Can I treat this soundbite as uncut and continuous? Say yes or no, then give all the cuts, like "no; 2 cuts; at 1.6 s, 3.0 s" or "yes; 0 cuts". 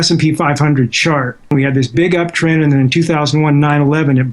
no; 1 cut; at 1.6 s